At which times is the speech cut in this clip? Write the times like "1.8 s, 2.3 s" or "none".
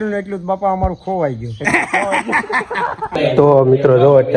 3.1 s

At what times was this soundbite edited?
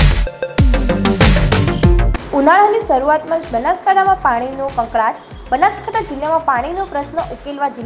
2.1 s

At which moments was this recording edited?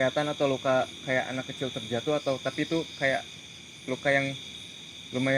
none

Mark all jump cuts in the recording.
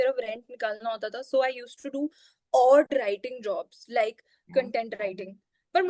none

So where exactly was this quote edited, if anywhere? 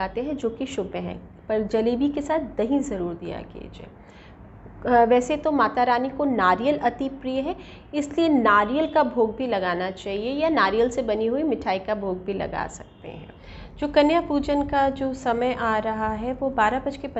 none

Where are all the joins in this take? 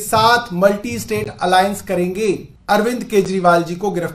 2.5 s

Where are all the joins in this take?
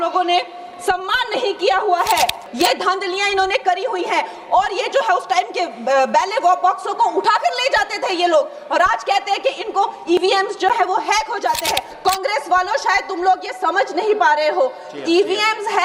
2.4 s, 11.9 s

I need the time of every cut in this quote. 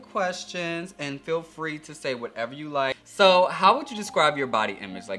3.0 s

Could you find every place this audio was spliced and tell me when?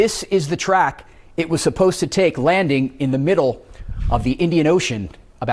none

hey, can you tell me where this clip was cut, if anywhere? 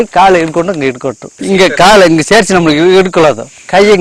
none

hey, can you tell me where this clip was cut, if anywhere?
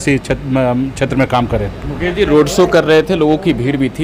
none

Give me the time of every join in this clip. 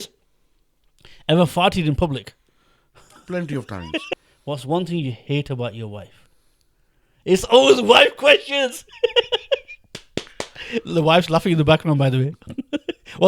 4.1 s

